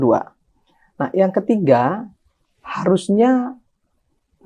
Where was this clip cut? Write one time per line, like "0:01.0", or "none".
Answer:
none